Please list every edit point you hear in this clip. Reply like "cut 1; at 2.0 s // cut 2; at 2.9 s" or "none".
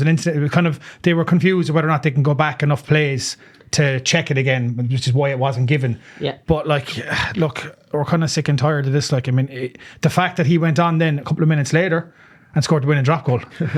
none